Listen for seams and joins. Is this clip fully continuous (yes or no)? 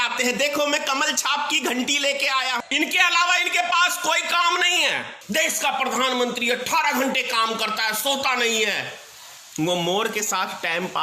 no